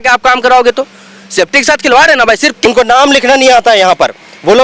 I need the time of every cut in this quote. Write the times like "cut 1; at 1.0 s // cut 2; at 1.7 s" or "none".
cut 1; at 2.6 s